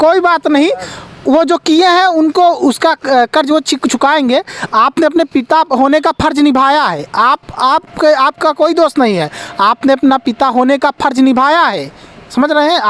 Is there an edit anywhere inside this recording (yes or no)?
no